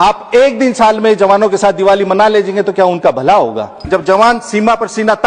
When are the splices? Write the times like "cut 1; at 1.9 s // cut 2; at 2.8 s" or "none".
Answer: cut 1; at 3.7 s